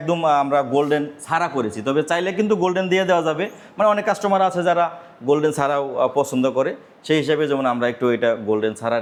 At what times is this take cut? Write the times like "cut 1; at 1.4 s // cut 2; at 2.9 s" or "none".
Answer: none